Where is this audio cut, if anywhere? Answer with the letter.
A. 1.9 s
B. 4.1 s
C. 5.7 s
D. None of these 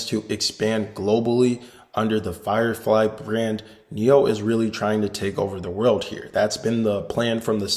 D